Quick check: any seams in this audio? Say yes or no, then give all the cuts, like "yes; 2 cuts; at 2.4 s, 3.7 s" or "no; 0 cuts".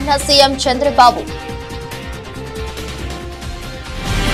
no; 0 cuts